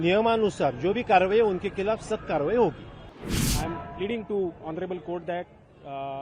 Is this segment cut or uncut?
cut